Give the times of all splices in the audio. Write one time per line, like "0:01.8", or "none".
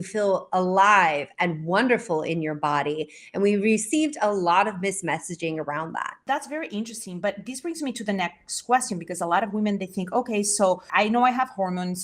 0:06.2